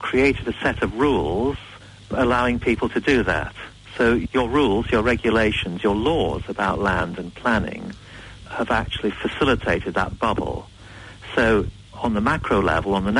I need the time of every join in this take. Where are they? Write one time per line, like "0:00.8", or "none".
0:02.1
0:04.2

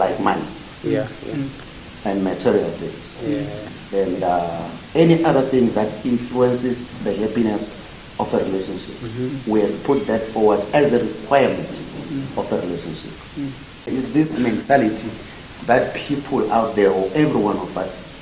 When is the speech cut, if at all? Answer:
0:13.9

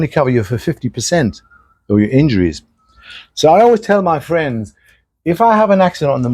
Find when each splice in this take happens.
none

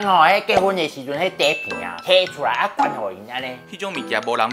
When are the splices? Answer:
0:03.6

